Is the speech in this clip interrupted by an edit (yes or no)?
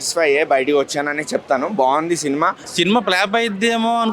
yes